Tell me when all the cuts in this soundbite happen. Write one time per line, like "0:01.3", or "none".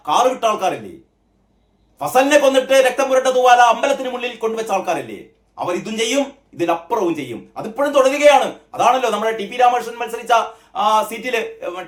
none